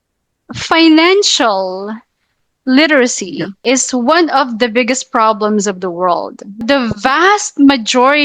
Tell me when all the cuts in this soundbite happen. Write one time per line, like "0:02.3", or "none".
0:03.5
0:06.6

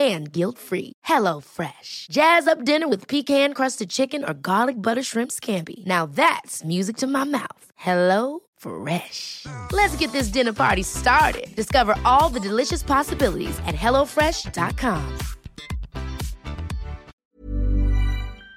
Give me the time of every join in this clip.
0:17.1

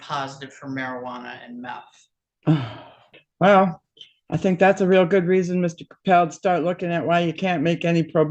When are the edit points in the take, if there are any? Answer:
none

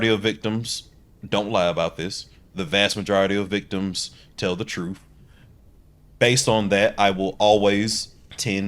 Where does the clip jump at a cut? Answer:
none

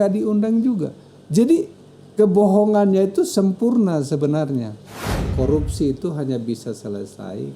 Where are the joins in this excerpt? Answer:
0:05.2

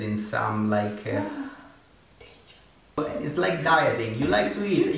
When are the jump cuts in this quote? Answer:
0:03.0

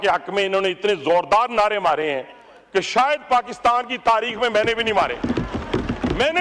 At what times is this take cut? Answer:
none

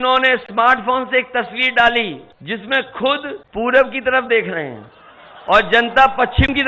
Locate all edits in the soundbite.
0:02.3
0:03.4

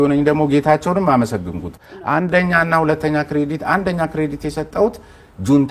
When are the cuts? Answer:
none

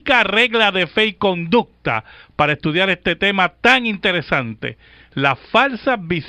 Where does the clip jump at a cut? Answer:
none

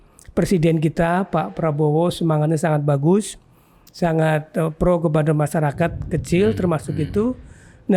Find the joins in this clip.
none

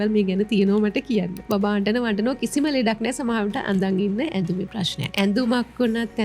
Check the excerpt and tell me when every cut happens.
0:01.4
0:05.1

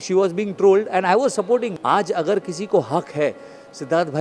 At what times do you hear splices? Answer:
0:01.7

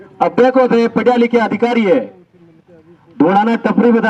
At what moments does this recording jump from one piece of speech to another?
none

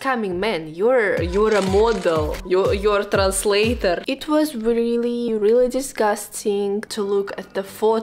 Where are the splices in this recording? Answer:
0:06.9

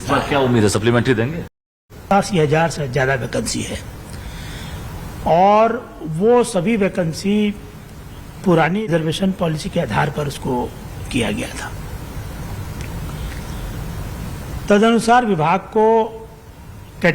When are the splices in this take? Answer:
0:01.5
0:08.8

